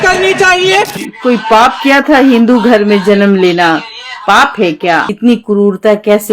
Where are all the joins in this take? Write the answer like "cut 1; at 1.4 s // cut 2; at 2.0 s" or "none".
cut 1; at 0.9 s // cut 2; at 5.1 s